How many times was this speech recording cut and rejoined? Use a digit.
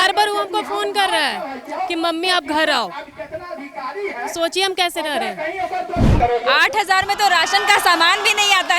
1